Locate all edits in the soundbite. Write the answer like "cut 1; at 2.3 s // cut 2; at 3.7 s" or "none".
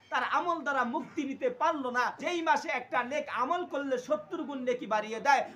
cut 1; at 2.2 s

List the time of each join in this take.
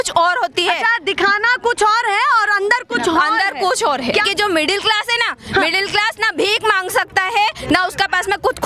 cut 1; at 4.3 s

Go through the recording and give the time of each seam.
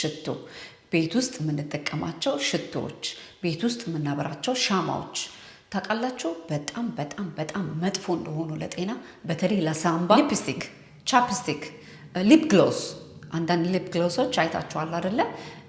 cut 1; at 10.2 s

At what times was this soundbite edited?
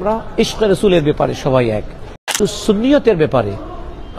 cut 1; at 2.4 s

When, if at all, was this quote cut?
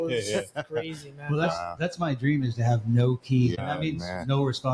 cut 1; at 3.6 s

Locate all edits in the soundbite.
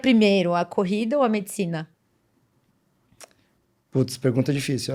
none

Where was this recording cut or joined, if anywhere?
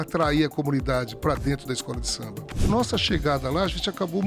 cut 1; at 2.6 s

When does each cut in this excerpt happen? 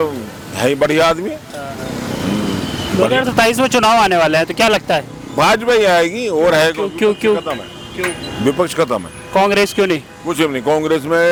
none

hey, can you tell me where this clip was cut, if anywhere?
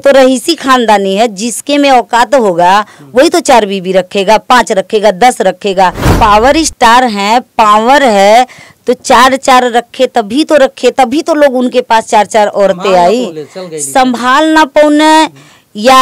cut 1; at 6.1 s

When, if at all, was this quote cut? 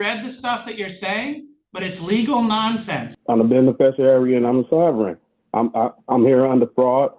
cut 1; at 3.1 s

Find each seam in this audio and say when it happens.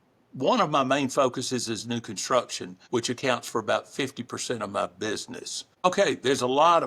cut 1; at 5.8 s

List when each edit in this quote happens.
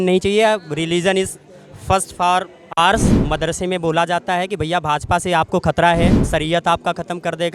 cut 1; at 3.2 s // cut 2; at 6.2 s

